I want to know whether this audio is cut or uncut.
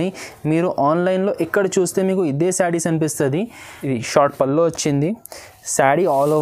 cut